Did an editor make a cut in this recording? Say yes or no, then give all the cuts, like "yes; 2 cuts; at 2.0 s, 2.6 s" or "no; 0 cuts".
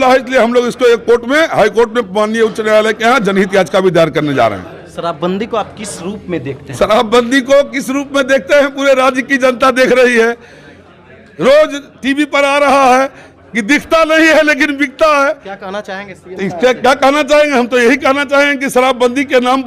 no; 0 cuts